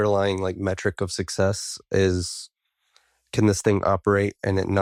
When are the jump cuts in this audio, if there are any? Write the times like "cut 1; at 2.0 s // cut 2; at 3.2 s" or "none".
none